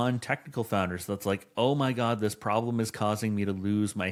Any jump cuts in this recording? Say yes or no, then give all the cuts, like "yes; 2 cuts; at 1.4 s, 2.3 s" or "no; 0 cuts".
no; 0 cuts